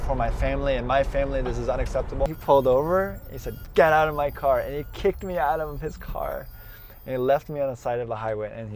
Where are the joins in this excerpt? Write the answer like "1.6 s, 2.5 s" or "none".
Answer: 2.4 s